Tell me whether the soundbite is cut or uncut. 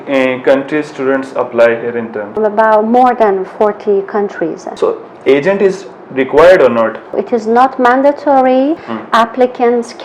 cut